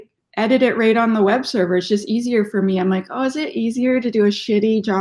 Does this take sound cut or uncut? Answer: uncut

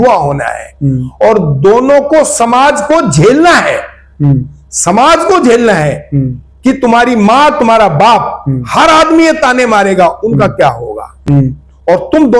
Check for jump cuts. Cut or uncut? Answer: uncut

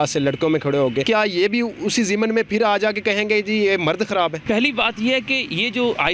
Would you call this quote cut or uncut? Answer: cut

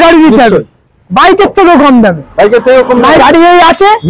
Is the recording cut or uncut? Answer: cut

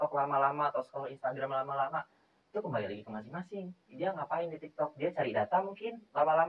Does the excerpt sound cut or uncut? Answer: uncut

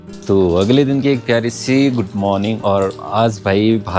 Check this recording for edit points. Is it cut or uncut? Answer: uncut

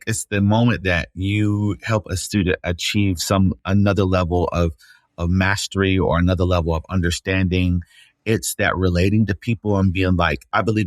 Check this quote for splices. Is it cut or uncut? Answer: uncut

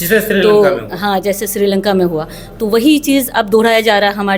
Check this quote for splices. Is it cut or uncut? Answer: uncut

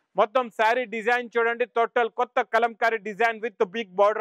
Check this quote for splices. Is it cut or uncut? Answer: uncut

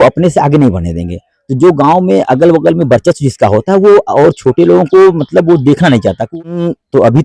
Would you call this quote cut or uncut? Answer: cut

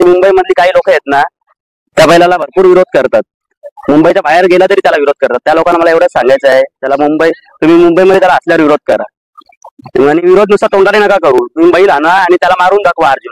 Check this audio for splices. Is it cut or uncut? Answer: uncut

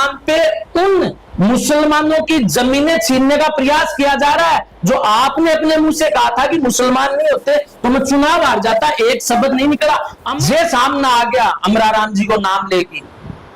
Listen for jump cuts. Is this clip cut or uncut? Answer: cut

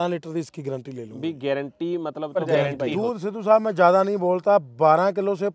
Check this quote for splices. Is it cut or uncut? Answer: cut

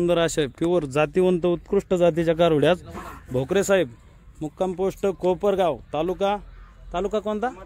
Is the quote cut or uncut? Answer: uncut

